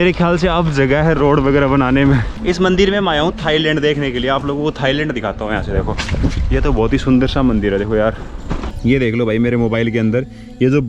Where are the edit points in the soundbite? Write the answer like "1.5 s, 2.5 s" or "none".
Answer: 2.3 s, 8.7 s

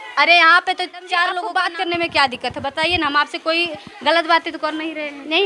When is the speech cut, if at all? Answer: 1.5 s

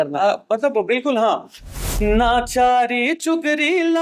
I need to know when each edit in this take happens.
1.8 s

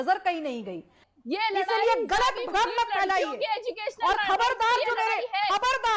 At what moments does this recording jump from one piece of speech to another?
1.1 s

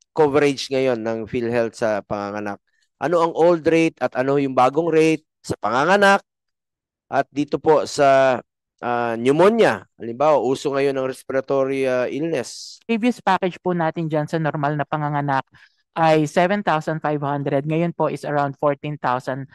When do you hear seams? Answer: 12.9 s

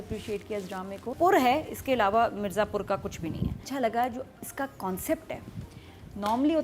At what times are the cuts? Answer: 1.1 s, 3.6 s

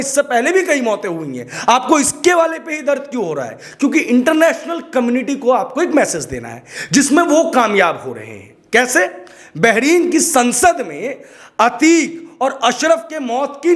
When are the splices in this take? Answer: none

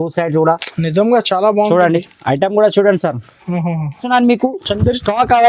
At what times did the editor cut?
4.0 s

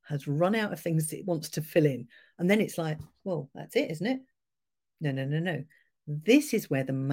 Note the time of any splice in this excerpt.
none

